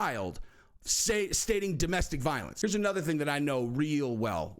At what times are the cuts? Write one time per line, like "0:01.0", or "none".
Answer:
0:02.5